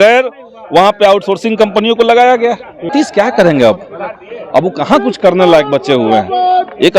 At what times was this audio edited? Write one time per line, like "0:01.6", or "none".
0:02.8